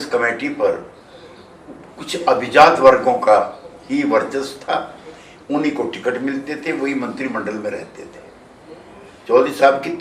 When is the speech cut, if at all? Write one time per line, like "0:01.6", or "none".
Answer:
none